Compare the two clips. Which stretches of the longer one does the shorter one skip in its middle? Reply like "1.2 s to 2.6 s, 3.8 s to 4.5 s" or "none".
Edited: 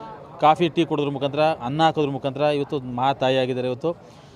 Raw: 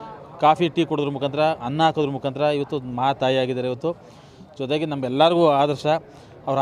none